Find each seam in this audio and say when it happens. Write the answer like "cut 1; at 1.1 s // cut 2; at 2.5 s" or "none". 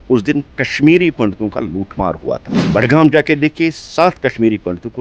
cut 1; at 2.5 s